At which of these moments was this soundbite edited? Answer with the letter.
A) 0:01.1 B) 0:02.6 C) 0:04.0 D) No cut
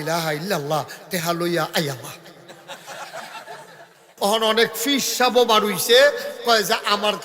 C